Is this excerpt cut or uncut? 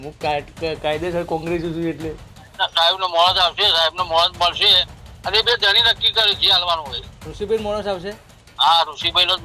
cut